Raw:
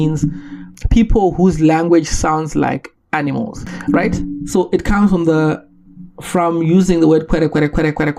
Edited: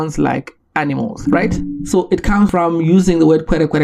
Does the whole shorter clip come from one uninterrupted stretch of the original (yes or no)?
no